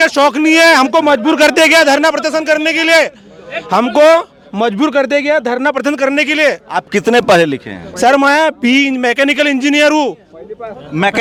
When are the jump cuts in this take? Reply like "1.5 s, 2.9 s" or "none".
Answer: none